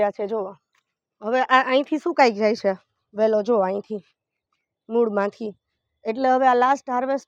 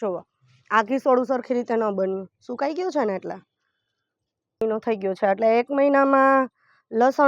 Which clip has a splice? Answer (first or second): second